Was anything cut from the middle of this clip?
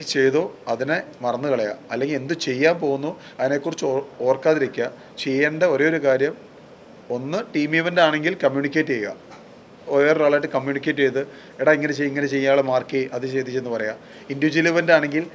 no; 0 cuts

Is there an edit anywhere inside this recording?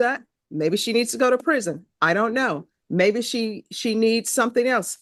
no; 0 cuts

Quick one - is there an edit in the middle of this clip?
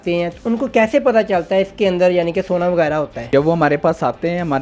yes; 1 cut; at 3.2 s

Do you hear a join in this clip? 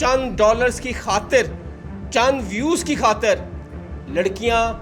no; 0 cuts

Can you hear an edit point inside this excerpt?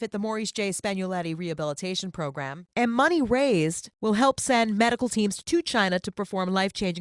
yes; 1 cut; at 2.6 s

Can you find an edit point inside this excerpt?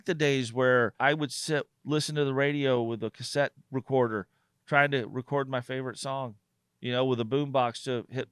yes; 2 cuts; at 0.9 s, 3.6 s

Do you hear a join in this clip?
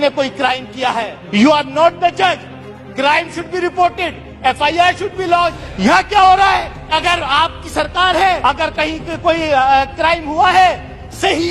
yes; 4 cuts; at 1.2 s, 5.7 s, 6.9 s, 8.4 s

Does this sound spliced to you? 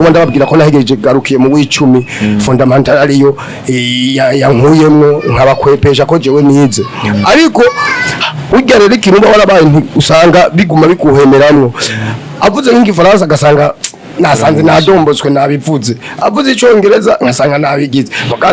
no; 0 cuts

